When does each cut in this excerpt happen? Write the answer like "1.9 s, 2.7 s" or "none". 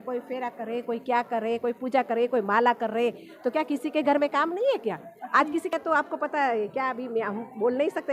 5.7 s